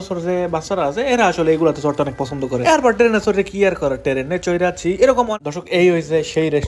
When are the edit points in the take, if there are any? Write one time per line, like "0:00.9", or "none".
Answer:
0:05.3